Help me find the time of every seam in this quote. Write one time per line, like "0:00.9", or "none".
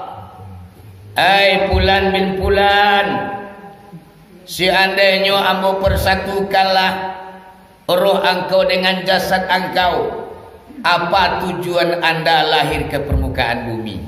none

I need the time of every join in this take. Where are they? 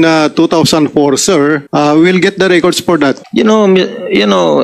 0:01.6
0:03.2

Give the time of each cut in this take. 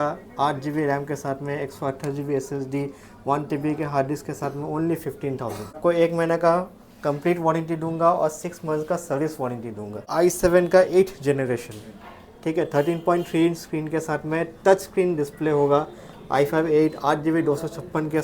0:05.8
0:10.1

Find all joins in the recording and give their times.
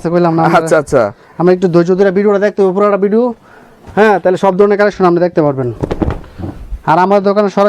none

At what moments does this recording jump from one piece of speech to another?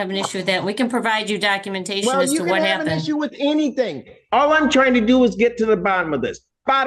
none

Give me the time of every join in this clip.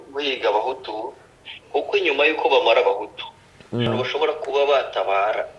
0:03.9

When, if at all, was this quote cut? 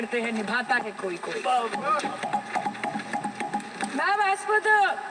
none

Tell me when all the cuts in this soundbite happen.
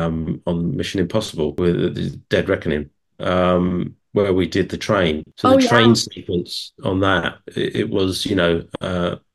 0:01.5
0:05.3

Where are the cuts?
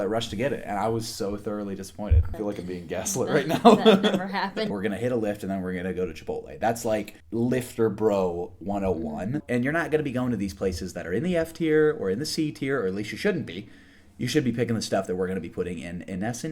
0:02.3
0:04.7
0:07.2
0:09.4

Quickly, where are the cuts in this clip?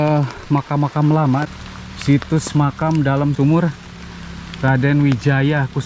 0:01.5
0:03.3

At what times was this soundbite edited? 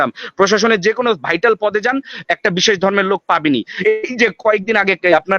0:03.7

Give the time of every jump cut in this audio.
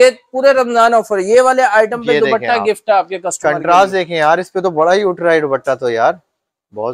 none

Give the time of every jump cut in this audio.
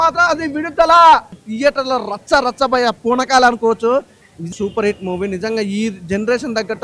0:01.4
0:04.4

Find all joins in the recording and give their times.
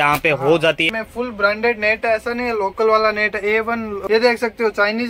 0:00.8
0:04.0

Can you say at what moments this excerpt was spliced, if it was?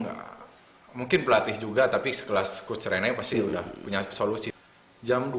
0:04.5

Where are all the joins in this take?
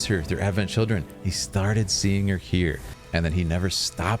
0:02.9

